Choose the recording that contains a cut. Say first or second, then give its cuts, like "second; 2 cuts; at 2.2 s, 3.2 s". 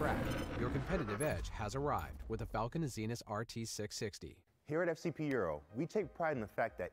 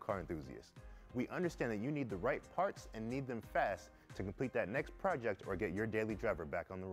first; 1 cut; at 4.3 s